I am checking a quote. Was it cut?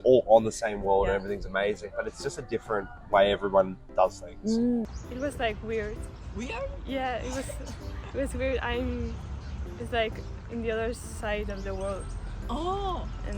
yes; 1 cut; at 4.9 s

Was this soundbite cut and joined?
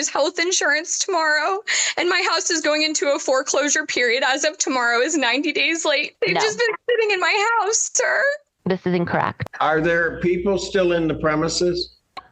yes; 2 cuts; at 6.1 s, 9.4 s

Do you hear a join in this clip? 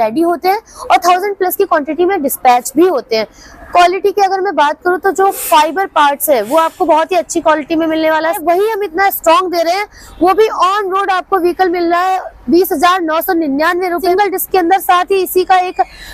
yes; 2 cuts; at 8.4 s, 14.0 s

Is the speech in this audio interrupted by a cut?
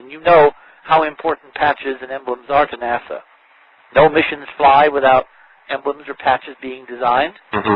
yes; 1 cut; at 2.6 s

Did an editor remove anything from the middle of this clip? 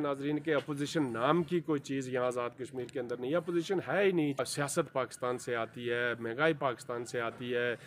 yes; 1 cut; at 4.4 s

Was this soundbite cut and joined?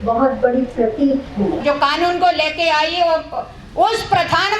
yes; 1 cut; at 1.6 s

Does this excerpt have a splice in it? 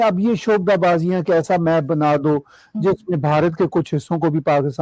no; 0 cuts

